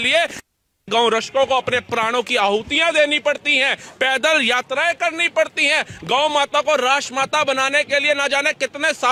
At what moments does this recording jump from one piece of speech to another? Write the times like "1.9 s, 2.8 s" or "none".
none